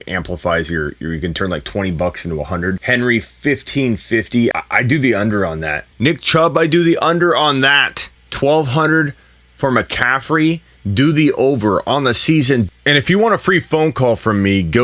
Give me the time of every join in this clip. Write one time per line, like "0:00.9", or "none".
0:05.9
0:12.7